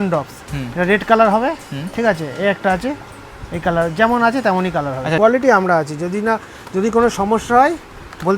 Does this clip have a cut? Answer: yes; 1 cut; at 5.2 s

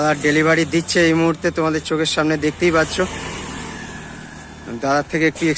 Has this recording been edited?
no; 0 cuts

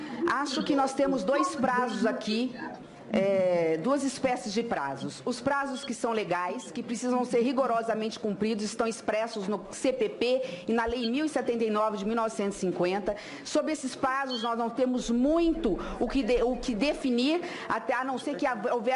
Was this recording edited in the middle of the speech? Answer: no; 0 cuts

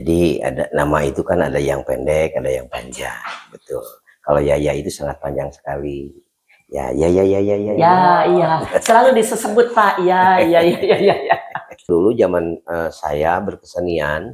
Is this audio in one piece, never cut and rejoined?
no; 2 cuts; at 7.7 s, 11.9 s

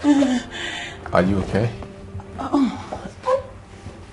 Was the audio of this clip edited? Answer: no; 0 cuts

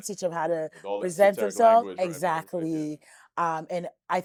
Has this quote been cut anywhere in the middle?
no; 0 cuts

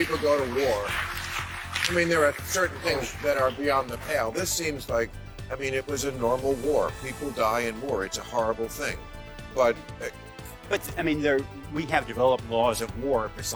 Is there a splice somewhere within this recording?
no; 0 cuts

